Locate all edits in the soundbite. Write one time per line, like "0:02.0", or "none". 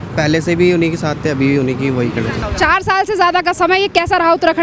0:02.4